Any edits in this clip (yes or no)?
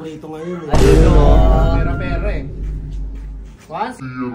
no